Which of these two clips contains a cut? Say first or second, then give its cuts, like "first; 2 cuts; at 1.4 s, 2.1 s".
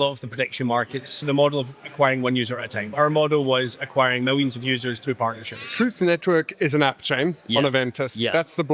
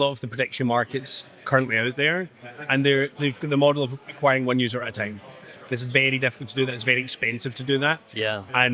first; 3 cuts; at 1.2 s, 2.9 s, 5.7 s